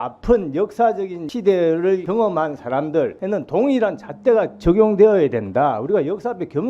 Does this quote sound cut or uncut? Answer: cut